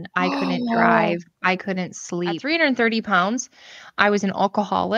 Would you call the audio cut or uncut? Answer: cut